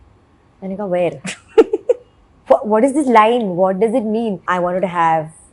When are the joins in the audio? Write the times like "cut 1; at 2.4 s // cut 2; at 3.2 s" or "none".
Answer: cut 1; at 4.4 s